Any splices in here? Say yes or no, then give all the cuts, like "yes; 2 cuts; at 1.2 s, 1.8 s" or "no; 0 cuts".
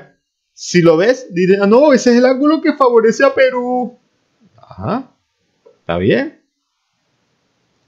no; 0 cuts